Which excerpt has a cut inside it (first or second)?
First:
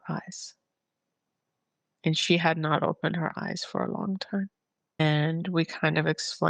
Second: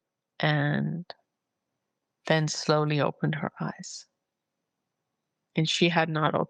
first